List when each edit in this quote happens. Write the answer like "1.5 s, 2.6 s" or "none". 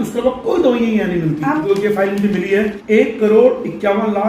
1.6 s, 2.8 s